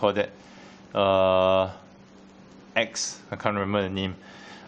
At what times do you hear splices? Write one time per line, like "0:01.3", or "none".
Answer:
0:03.4